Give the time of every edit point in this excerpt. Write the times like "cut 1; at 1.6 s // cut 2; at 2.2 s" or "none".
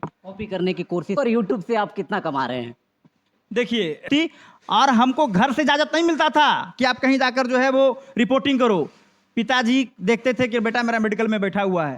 cut 1; at 1.2 s // cut 2; at 4.1 s